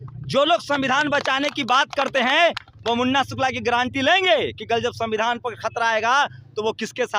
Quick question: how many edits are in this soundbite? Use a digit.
0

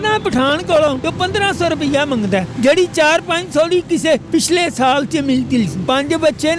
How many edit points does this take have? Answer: 4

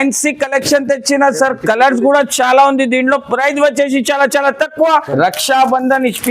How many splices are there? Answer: 1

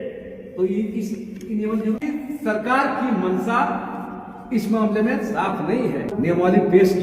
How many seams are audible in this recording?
2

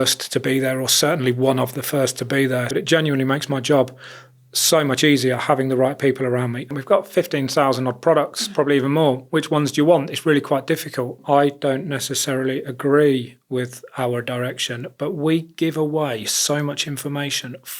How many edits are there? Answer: 3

